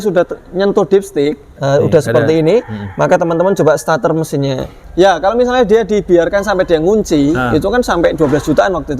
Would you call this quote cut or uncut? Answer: cut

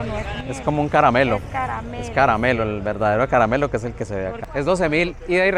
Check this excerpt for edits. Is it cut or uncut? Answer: cut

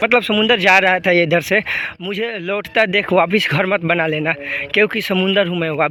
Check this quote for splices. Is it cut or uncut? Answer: uncut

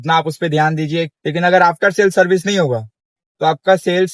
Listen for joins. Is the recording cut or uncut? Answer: cut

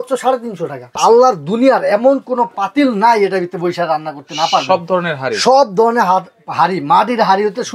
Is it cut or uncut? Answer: cut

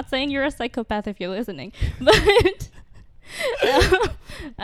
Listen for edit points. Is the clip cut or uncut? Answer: uncut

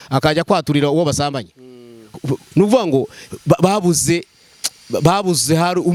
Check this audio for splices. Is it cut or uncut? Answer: uncut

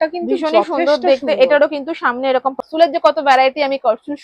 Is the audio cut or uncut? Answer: cut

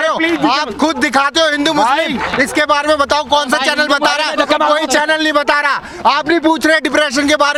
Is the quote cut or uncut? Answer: uncut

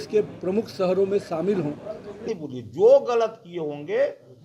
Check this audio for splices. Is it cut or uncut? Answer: cut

